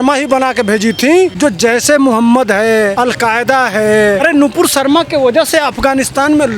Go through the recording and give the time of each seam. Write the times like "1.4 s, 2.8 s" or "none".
1.3 s, 2.9 s, 4.2 s